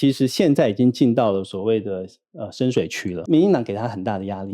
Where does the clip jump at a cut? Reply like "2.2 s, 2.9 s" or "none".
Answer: 3.2 s

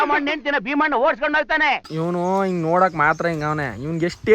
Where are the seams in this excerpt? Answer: 1.8 s

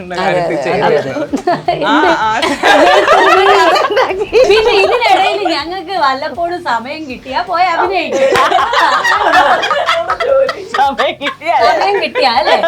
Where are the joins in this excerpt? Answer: 4.5 s

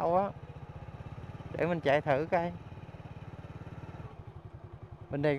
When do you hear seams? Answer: 4.0 s

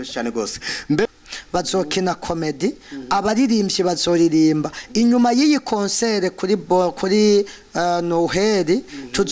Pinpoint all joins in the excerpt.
1.1 s

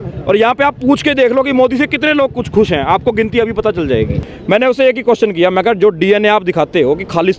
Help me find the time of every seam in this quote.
4.3 s

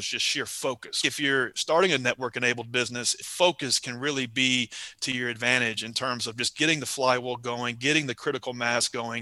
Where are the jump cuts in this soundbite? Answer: 1.0 s, 3.3 s

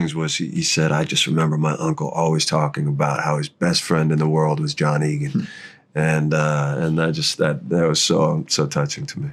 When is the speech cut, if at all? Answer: none

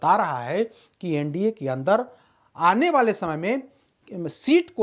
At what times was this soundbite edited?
none

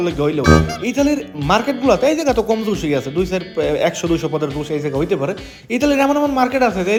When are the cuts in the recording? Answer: none

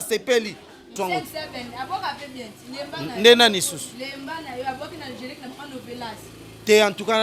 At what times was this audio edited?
0.9 s

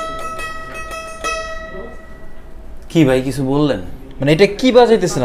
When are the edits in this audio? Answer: none

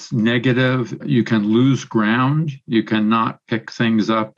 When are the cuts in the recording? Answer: 0.9 s

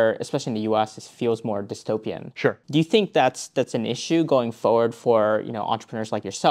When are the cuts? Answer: 2.6 s

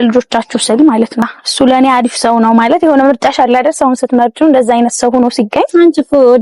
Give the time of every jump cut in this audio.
1.4 s

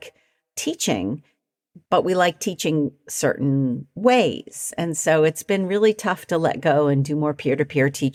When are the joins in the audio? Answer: none

